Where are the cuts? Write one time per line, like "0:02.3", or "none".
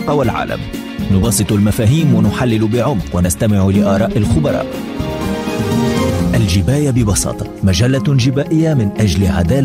none